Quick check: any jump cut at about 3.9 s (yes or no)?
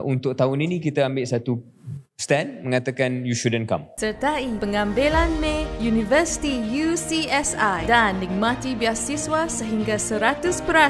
yes